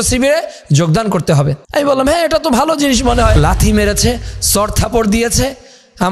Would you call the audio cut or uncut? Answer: cut